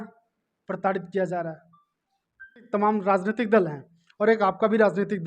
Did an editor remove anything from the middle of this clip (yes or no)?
yes